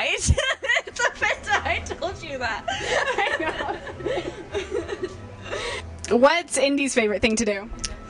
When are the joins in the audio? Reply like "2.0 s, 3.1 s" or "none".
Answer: 5.9 s